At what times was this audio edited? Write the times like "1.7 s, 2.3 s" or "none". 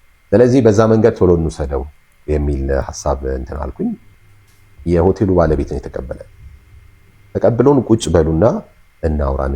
4.1 s